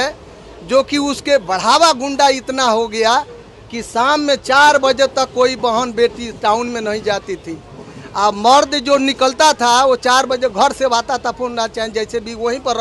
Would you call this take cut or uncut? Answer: uncut